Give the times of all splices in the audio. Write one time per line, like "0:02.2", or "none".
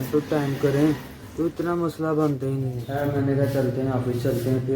0:02.8